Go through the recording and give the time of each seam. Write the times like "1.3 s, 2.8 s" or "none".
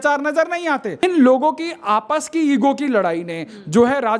1.0 s